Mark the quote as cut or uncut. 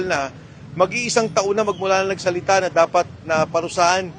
uncut